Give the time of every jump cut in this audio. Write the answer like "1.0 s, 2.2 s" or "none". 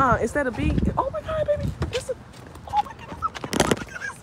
none

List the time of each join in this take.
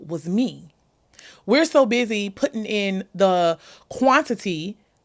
none

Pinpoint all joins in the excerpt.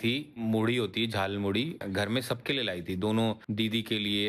1.8 s

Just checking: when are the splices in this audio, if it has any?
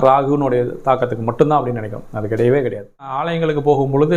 3.3 s

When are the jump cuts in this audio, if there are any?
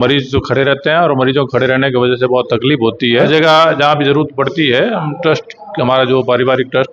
3.3 s

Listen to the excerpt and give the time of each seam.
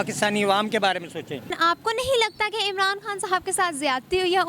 1.6 s

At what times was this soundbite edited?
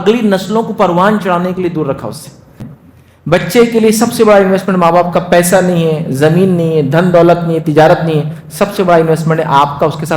2.7 s

